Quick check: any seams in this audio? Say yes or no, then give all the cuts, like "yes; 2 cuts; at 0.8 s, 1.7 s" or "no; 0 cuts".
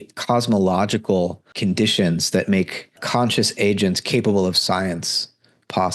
yes; 2 cuts; at 1.5 s, 3.0 s